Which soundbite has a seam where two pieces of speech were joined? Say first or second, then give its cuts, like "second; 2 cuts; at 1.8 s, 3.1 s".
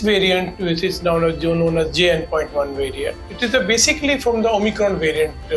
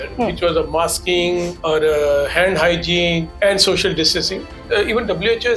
second; 3 cuts; at 1.5 s, 3.3 s, 4.6 s